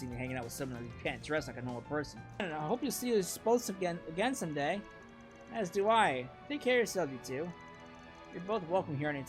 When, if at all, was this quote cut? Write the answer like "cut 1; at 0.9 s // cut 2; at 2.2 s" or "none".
cut 1; at 2.5 s